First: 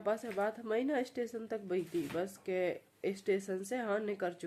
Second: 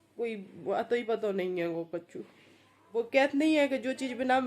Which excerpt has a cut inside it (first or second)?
second